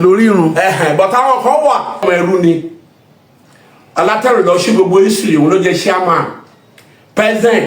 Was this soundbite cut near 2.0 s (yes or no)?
yes